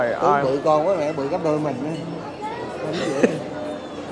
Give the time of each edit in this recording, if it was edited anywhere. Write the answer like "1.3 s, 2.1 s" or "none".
none